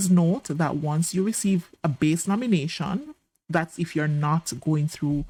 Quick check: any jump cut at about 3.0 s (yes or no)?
no